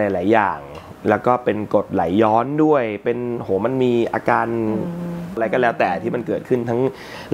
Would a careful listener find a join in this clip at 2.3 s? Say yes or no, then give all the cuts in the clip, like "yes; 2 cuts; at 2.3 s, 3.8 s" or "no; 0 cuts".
no; 1 cut; at 5.4 s